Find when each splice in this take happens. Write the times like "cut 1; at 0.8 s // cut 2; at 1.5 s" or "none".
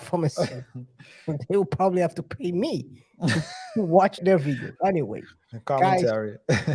cut 1; at 4.2 s